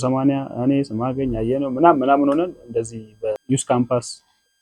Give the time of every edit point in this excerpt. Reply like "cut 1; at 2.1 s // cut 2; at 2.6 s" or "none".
cut 1; at 3.4 s